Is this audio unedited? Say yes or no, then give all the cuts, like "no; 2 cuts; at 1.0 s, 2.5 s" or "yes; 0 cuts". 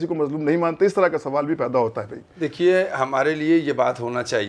yes; 0 cuts